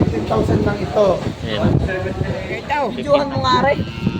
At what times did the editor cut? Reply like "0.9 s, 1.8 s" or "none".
2.8 s